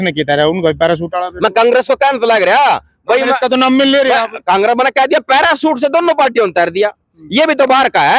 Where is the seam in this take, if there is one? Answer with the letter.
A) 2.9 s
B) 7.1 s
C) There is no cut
C